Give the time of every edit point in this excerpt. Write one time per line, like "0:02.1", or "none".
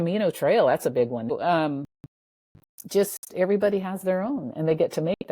0:01.3